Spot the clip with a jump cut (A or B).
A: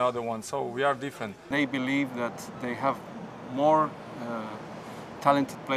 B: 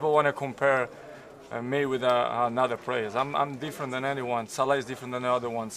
A